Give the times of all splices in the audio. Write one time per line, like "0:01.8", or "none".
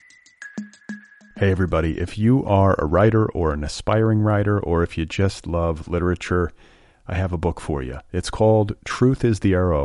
0:00.9